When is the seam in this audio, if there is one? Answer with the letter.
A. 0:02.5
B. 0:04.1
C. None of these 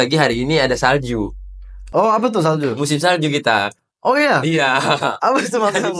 C